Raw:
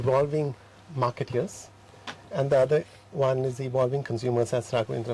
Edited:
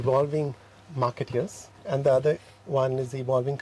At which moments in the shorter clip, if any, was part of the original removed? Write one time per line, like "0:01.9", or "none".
0:01.7